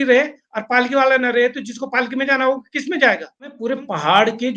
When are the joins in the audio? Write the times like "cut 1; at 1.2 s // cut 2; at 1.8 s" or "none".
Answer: cut 1; at 3.6 s